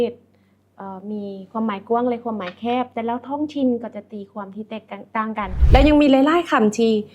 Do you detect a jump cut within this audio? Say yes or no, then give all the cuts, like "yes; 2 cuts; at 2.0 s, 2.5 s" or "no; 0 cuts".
yes; 1 cut; at 5.6 s